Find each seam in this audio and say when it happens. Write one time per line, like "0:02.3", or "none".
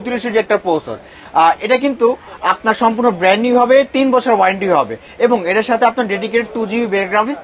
none